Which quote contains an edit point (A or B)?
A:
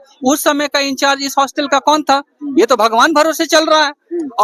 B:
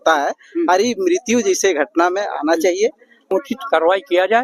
B